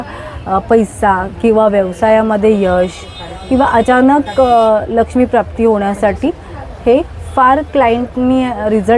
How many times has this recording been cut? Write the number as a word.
zero